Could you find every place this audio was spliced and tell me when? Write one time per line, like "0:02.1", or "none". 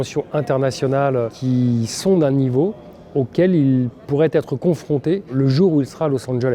0:01.4
0:05.3